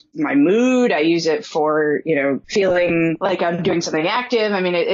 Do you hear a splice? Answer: yes; 2 cuts; at 2.4 s, 3.2 s

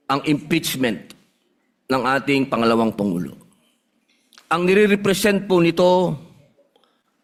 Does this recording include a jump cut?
no; 0 cuts

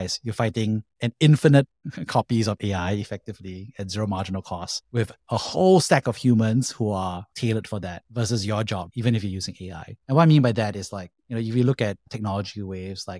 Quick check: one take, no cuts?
yes; 0 cuts

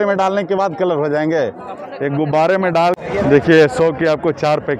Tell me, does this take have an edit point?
yes; 1 cut; at 3.0 s

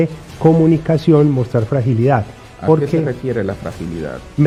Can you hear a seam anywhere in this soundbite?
no; 0 cuts

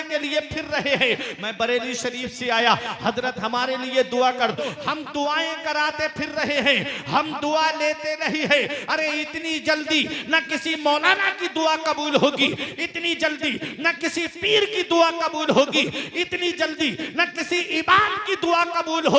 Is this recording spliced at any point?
yes; 1 cut; at 4.6 s

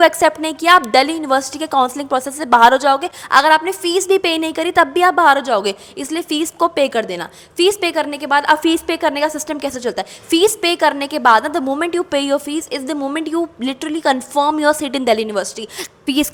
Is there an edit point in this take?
no; 0 cuts

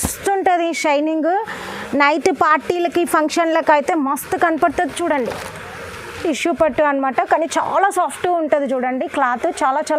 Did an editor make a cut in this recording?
yes; 1 cut; at 6.2 s

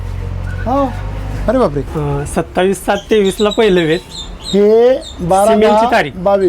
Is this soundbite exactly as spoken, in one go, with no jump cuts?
no; 1 cut; at 1.9 s

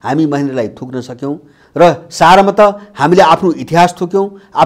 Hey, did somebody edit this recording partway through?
no; 0 cuts

